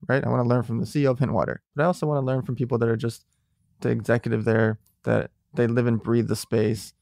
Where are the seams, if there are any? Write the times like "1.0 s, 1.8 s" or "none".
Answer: 1.6 s